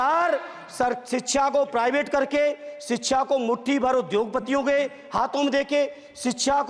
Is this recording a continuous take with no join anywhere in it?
yes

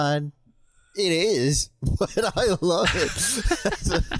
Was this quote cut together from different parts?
no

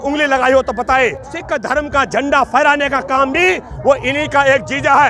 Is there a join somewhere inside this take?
yes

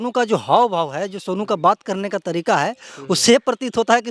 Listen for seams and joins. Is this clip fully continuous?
yes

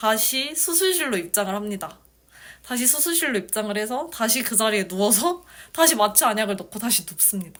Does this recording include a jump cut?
no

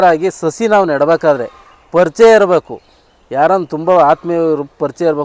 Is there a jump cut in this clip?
no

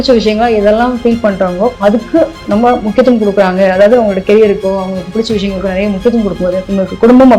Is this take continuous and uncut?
yes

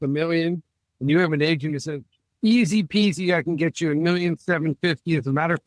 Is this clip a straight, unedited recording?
yes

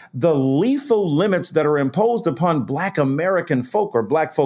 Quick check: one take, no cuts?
yes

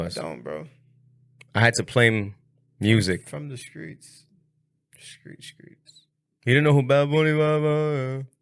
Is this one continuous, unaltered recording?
yes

